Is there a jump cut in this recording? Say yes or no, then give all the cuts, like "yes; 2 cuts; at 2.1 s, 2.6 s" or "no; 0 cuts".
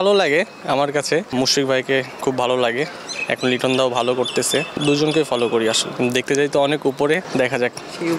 yes; 4 cuts; at 1.3 s, 4.7 s, 5.9 s, 7.2 s